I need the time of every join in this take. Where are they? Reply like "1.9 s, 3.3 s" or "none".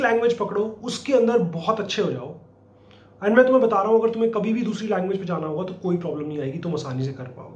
none